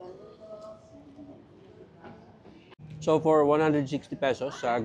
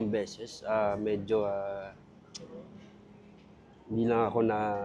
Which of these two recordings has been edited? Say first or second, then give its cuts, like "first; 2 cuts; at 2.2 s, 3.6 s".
first; 1 cut; at 2.8 s